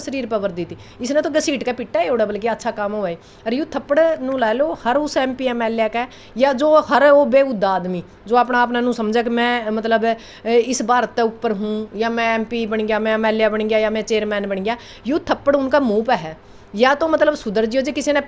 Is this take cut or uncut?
uncut